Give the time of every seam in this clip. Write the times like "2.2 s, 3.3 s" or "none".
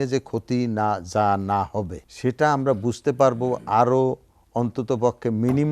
2.0 s